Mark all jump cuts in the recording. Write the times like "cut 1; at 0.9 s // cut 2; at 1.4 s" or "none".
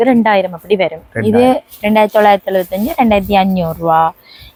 none